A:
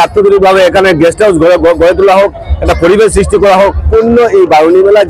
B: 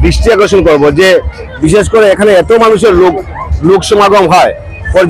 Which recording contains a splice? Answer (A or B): A